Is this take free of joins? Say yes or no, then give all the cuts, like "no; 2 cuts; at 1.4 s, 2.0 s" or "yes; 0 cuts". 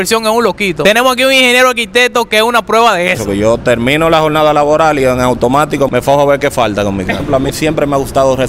no; 4 cuts; at 0.8 s, 3.2 s, 5.9 s, 7.2 s